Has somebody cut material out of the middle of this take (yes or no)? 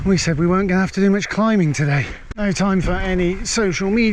yes